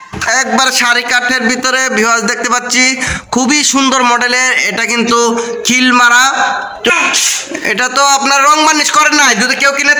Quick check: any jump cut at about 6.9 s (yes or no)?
yes